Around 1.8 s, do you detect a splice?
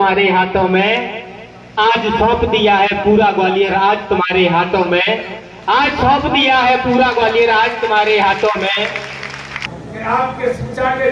no; 1 cut; at 9.7 s

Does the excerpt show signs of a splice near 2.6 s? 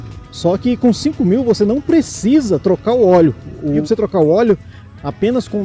no; 1 cut; at 3.8 s

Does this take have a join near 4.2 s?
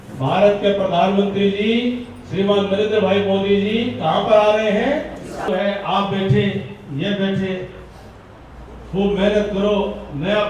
no; 1 cut; at 5.5 s

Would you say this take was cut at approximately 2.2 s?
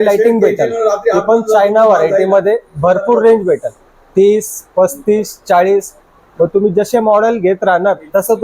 no; 0 cuts

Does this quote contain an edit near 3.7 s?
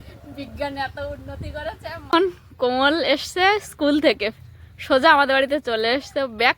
no; 1 cut; at 2.0 s

